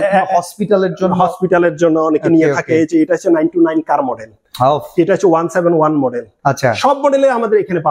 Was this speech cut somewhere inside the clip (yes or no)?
no